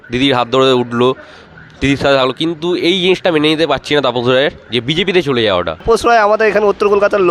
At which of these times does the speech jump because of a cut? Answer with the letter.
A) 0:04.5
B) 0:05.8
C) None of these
B